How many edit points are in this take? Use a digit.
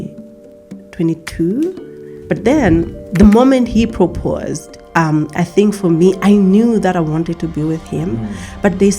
2